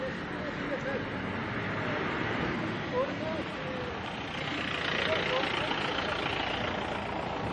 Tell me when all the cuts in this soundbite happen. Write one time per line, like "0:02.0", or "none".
none